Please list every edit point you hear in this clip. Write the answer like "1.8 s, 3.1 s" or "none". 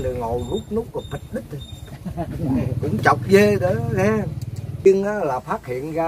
4.9 s